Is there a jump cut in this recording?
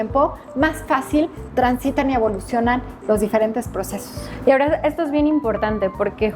no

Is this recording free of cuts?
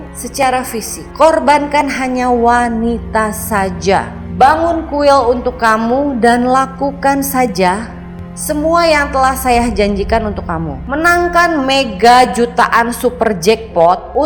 yes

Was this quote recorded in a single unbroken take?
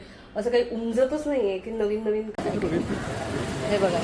no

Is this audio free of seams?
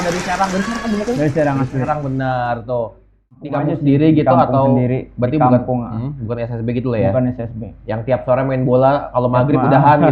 no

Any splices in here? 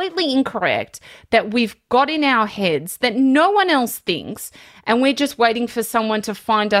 no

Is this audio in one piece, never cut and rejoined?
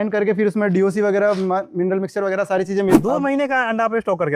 no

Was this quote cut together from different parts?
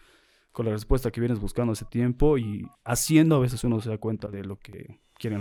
no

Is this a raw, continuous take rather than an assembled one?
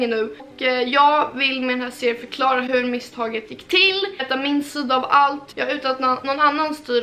no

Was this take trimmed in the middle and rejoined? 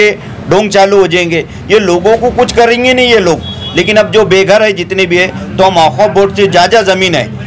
no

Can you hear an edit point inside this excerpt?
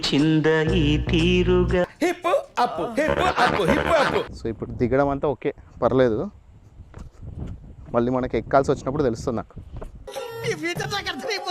yes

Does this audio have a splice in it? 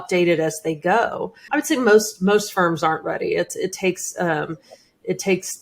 yes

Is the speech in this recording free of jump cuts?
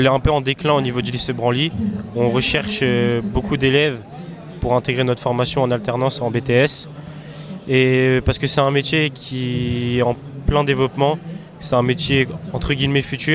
yes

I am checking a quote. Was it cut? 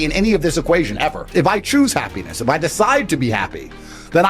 yes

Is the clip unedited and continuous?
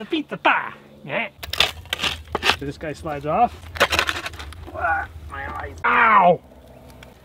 no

